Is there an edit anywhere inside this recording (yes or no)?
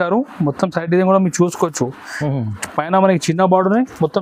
no